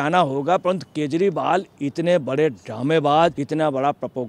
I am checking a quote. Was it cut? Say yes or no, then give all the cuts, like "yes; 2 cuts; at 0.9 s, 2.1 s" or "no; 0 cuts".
yes; 1 cut; at 3.4 s